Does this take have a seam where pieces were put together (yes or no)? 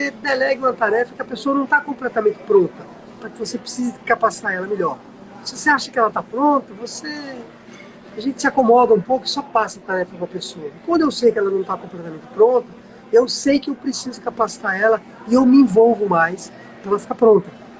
no